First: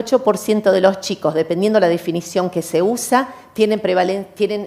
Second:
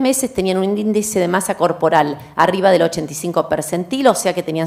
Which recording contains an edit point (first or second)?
second